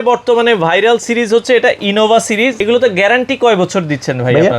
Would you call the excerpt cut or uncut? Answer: cut